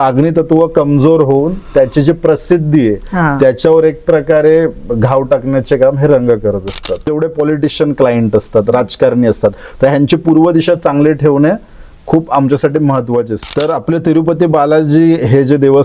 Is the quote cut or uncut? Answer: cut